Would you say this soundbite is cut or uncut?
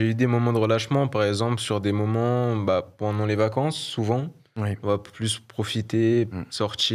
uncut